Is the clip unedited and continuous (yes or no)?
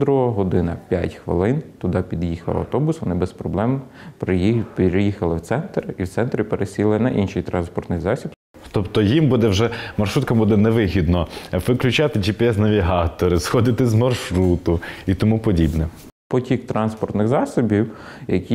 no